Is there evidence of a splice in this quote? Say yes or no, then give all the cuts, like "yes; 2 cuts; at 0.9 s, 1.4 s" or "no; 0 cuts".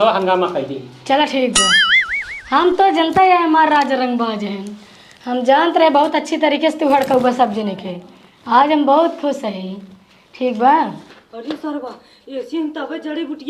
yes; 1 cut; at 11.6 s